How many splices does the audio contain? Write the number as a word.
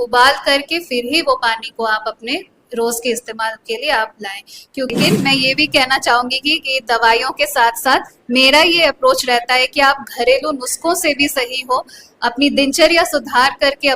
one